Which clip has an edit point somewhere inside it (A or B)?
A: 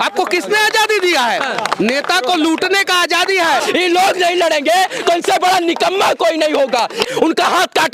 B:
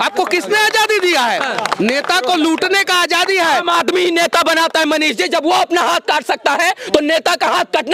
A